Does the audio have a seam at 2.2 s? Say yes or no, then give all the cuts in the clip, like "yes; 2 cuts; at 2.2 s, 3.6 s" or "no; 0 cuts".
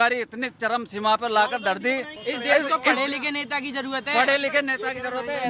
yes; 1 cut; at 2.2 s